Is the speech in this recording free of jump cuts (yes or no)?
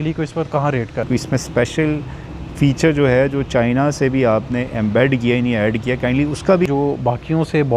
no